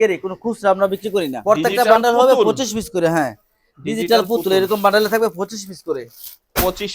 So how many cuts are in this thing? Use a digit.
1